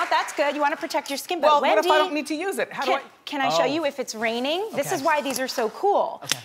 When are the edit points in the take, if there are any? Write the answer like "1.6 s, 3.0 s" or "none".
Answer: 3.8 s